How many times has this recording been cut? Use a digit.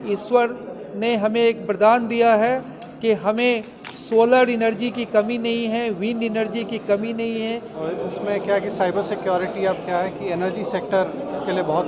1